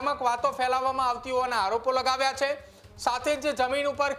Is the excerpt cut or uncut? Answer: uncut